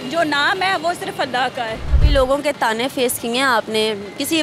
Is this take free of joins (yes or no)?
no